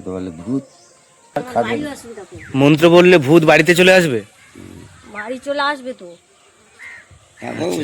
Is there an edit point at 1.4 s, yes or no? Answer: yes